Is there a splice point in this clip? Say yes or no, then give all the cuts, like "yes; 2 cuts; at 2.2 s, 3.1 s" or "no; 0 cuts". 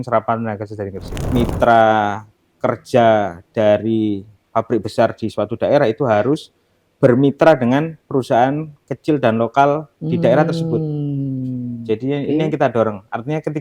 yes; 1 cut; at 1.1 s